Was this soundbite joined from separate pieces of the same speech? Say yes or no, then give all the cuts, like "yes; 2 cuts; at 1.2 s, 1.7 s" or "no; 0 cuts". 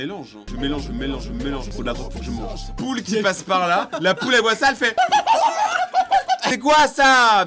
yes; 2 cuts; at 2.7 s, 6.4 s